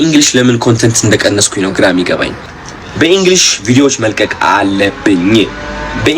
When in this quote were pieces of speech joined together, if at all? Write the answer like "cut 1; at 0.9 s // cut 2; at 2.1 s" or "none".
cut 1; at 2.4 s